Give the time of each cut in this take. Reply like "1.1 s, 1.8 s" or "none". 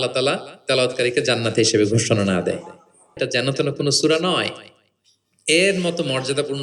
3.1 s